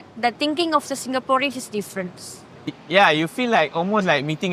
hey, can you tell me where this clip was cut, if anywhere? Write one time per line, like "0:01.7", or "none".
none